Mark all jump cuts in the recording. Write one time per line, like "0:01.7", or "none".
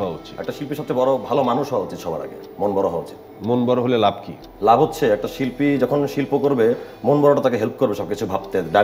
none